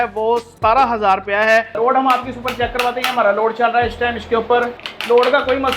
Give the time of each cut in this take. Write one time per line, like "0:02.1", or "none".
0:01.7
0:04.9